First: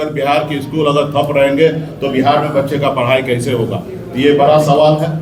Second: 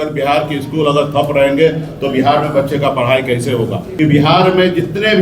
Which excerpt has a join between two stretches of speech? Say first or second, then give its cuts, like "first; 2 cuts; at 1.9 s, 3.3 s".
second; 1 cut; at 3.8 s